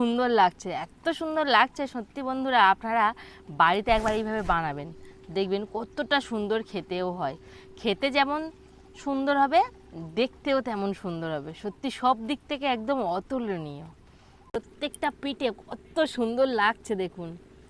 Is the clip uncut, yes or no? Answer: no